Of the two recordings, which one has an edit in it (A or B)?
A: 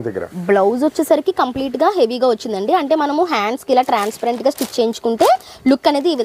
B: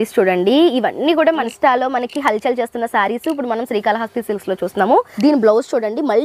B